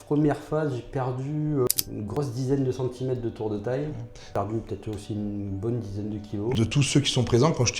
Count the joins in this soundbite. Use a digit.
3